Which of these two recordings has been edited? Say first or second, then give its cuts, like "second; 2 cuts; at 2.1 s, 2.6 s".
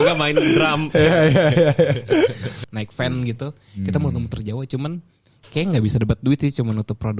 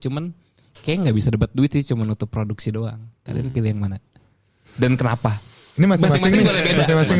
first; 1 cut; at 2.6 s